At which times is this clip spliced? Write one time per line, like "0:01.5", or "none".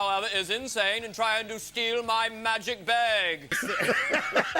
0:03.5